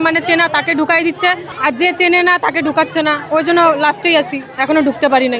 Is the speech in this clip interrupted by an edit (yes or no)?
yes